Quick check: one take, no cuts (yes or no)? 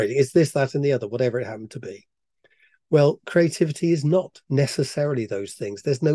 yes